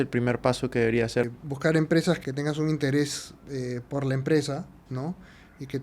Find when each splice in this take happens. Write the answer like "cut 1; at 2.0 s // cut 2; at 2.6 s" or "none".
cut 1; at 1.3 s // cut 2; at 2.2 s